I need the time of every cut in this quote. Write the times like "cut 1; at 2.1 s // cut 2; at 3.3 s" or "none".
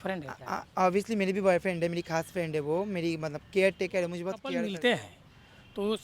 cut 1; at 4.4 s